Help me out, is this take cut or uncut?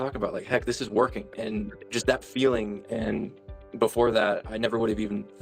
cut